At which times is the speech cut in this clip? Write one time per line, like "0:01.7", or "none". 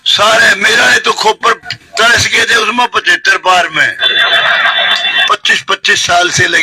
0:05.2